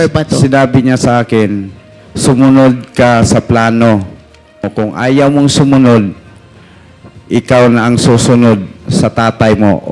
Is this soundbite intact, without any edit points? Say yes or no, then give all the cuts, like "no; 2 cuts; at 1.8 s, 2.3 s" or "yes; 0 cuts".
no; 1 cut; at 4.8 s